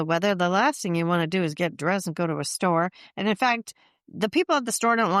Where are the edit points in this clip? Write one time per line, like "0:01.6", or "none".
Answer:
none